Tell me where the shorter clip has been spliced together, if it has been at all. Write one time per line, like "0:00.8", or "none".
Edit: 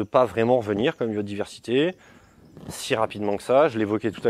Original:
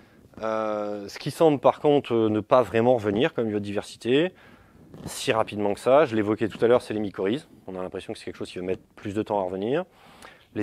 none